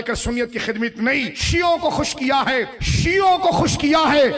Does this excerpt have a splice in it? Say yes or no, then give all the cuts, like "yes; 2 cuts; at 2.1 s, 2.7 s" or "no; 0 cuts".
yes; 2 cuts; at 1.4 s, 2.8 s